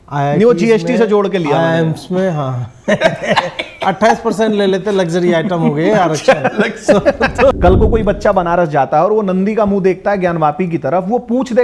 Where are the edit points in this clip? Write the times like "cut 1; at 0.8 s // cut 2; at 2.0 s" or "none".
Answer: cut 1; at 7.6 s